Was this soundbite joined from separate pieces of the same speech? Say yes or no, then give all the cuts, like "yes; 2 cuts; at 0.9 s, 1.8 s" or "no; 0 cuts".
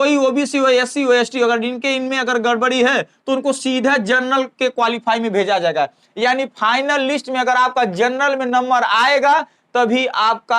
no; 0 cuts